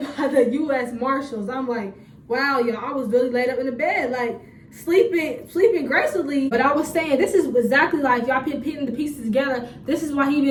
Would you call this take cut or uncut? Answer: uncut